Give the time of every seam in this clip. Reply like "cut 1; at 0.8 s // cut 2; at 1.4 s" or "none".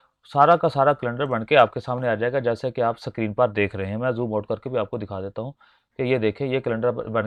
none